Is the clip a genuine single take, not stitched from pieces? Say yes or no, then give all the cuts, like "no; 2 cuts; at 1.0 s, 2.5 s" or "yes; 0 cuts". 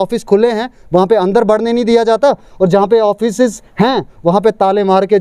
yes; 0 cuts